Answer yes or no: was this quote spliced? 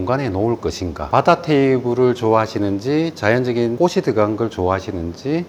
yes